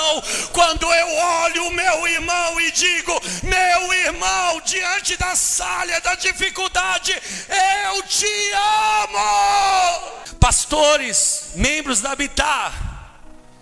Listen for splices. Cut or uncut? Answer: cut